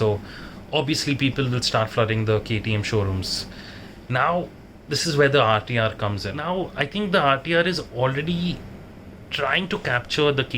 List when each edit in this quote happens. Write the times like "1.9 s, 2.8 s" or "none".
6.3 s